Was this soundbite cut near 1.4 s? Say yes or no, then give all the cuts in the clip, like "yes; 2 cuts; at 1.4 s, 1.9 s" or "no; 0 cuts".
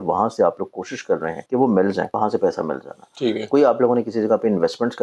yes; 2 cuts; at 1.4 s, 2.1 s